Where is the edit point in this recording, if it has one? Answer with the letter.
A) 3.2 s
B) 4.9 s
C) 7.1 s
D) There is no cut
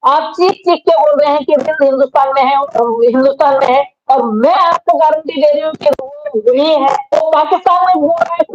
C